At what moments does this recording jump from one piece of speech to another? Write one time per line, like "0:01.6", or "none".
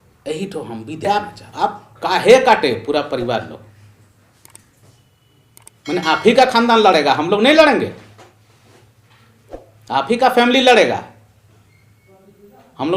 0:01.0